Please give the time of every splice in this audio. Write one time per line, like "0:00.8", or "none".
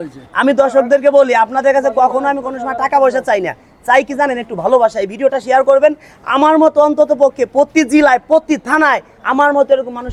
none